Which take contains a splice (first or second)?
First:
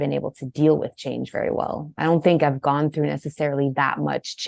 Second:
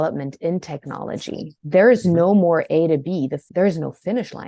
second